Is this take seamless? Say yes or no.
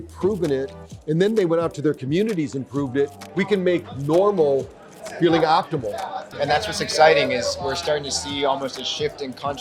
no